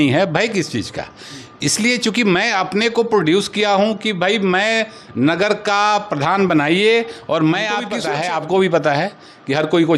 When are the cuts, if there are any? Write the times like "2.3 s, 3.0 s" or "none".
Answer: 7.9 s